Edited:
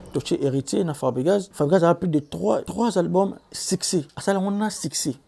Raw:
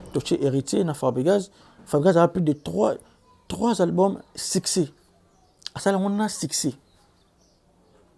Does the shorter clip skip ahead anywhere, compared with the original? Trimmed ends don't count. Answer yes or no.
yes